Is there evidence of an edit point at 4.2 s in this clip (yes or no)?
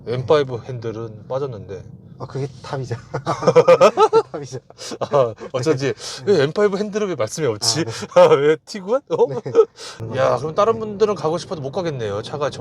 no